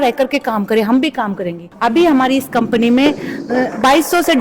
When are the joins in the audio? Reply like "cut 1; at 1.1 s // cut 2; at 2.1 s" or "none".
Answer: cut 1; at 1.7 s